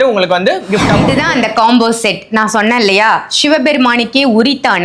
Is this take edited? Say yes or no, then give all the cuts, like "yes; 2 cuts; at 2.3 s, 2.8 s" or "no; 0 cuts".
yes; 1 cut; at 1.1 s